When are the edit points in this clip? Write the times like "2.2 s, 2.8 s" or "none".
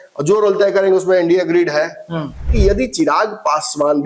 2.5 s